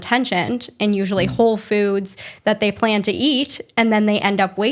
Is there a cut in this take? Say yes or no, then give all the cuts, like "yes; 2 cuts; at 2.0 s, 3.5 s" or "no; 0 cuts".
no; 0 cuts